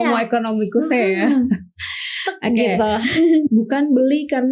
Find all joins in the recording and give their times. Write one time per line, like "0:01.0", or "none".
0:03.5

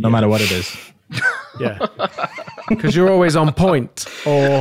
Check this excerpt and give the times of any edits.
none

